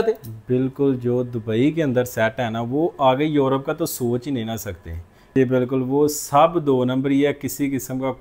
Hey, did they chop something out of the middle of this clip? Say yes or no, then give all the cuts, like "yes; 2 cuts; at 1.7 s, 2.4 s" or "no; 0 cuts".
yes; 1 cut; at 5.3 s